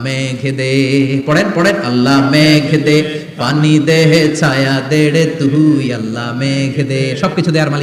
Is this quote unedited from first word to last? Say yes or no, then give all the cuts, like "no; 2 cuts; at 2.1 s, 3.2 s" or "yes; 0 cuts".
yes; 0 cuts